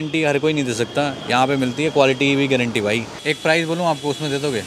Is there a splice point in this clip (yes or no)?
yes